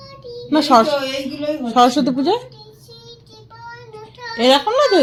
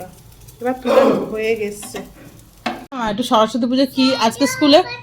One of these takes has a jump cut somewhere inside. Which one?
second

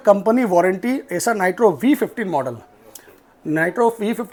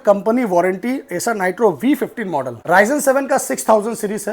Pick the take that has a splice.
second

